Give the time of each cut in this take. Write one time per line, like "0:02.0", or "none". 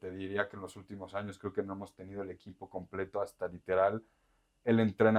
none